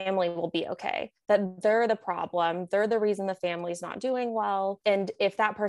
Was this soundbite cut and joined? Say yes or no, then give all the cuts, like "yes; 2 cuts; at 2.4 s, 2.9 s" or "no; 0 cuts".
yes; 1 cut; at 4.8 s